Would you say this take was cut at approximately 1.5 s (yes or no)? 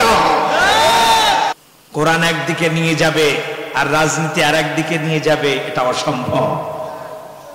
yes